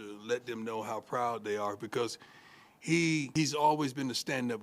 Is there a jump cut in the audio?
yes; 1 cut; at 3.3 s

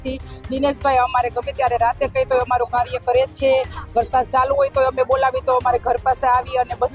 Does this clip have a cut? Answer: no; 0 cuts

